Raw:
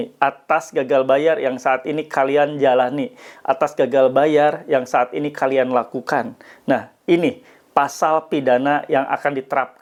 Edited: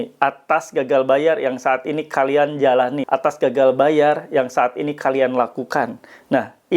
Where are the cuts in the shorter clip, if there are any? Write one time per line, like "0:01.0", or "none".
0:03.0